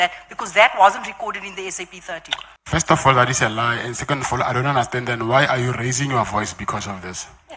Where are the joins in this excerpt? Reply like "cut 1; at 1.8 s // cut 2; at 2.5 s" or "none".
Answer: cut 1; at 2.5 s